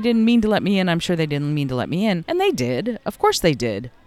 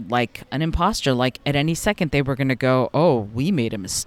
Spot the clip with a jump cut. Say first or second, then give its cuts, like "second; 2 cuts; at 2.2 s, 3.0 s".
first; 1 cut; at 2.2 s